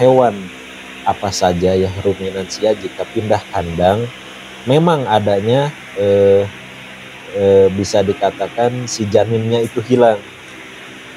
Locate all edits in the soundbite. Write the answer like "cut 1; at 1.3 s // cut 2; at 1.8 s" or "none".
none